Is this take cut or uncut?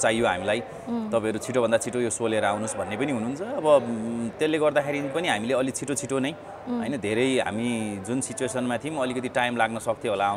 uncut